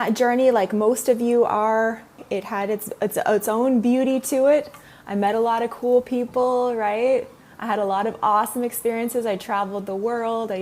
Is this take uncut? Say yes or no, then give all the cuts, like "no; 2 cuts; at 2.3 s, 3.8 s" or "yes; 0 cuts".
no; 1 cut; at 2.2 s